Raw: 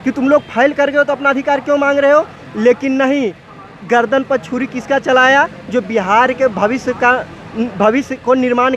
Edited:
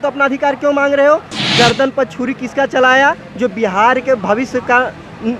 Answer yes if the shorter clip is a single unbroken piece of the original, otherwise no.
no